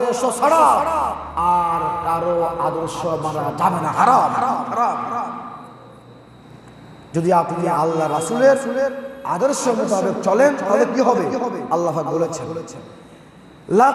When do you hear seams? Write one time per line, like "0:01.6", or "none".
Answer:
none